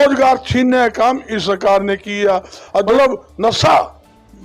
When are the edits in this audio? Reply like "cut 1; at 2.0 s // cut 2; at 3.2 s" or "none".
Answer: cut 1; at 2.9 s